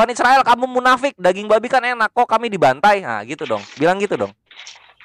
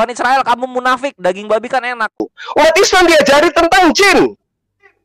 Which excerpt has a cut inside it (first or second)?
second